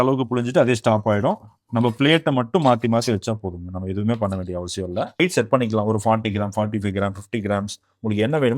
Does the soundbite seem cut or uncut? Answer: cut